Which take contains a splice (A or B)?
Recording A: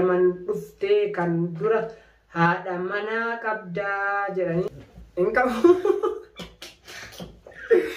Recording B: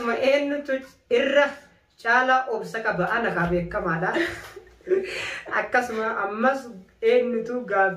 A